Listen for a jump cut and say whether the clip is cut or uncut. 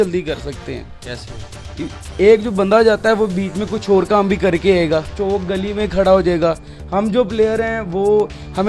uncut